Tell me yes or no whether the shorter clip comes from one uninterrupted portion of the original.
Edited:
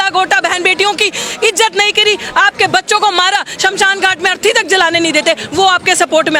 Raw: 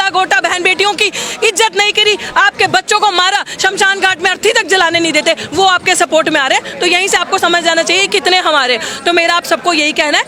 yes